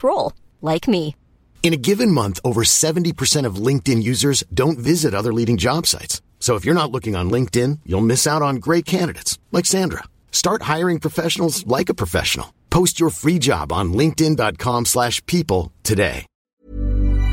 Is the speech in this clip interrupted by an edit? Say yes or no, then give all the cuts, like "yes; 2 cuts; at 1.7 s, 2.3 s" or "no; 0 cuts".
yes; 1 cut; at 16.3 s